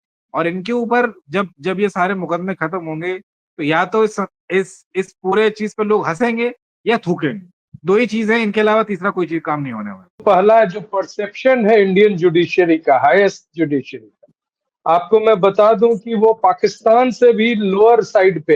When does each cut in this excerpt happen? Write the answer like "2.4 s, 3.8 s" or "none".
10.2 s